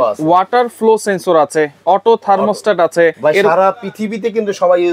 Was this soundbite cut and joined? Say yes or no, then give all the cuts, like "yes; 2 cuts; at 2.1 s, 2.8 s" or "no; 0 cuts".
yes; 1 cut; at 3.2 s